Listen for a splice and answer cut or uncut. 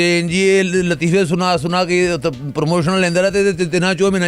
uncut